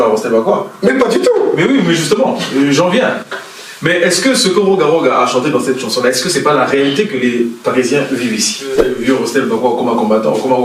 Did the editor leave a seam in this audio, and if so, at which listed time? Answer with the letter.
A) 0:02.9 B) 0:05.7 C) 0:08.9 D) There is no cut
C